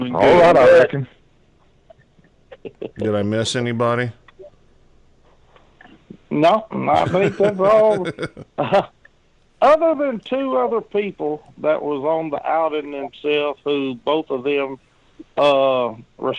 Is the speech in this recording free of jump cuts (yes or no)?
no